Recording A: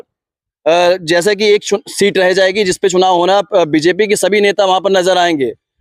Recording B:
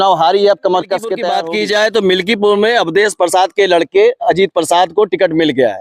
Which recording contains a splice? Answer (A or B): B